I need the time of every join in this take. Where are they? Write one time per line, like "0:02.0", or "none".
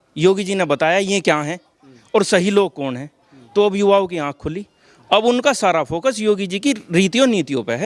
none